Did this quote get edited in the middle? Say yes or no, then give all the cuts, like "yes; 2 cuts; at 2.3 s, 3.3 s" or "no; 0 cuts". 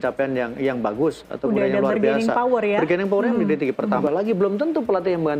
yes; 1 cut; at 4.0 s